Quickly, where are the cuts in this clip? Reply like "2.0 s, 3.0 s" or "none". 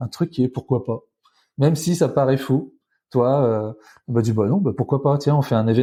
none